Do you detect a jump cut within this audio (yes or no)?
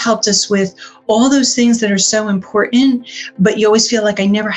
no